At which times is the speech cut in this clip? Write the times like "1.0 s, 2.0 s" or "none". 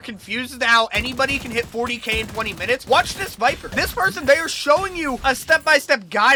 none